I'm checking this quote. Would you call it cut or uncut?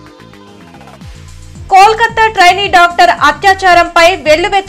uncut